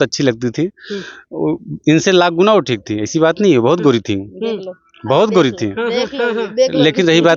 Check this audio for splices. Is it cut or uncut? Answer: uncut